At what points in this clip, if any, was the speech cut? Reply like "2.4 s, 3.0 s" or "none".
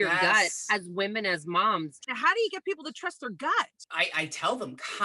2.0 s, 3.8 s